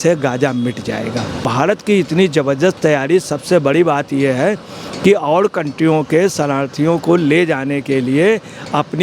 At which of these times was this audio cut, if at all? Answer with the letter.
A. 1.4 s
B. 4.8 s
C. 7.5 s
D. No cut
A